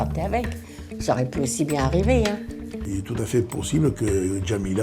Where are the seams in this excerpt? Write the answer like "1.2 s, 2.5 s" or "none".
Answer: 2.9 s